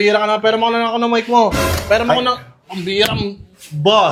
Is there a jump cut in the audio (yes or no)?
no